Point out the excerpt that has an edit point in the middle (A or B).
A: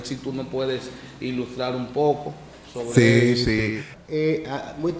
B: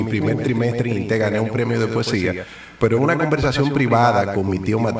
A